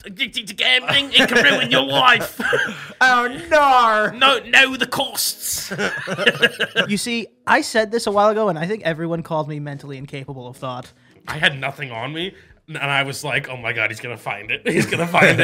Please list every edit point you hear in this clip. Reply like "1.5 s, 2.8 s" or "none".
6.9 s, 11.1 s